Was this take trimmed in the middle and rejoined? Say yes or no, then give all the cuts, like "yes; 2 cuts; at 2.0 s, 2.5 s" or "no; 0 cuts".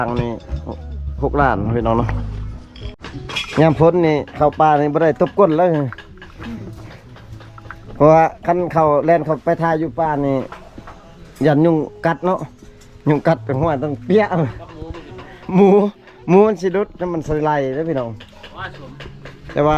yes; 1 cut; at 3.0 s